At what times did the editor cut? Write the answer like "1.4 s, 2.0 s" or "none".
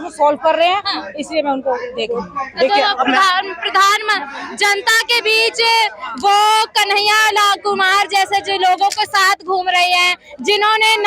none